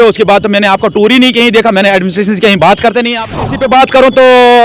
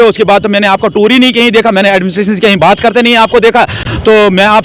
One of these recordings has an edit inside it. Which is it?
first; 1 cut; at 3.4 s

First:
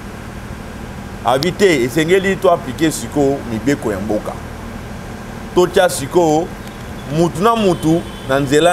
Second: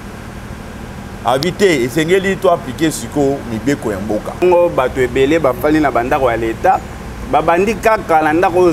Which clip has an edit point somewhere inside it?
second; 1 cut; at 4.4 s

